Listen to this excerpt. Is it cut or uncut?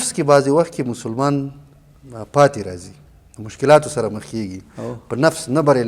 uncut